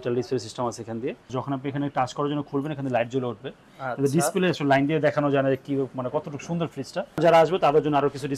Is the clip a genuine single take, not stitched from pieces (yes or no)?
no